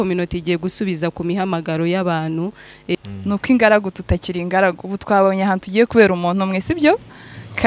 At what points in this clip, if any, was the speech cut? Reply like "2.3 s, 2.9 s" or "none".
2.9 s